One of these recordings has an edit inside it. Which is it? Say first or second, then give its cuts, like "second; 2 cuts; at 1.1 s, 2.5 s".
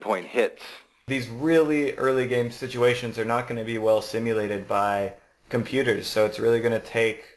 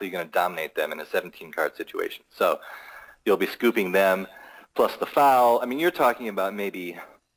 first; 2 cuts; at 1.0 s, 2.6 s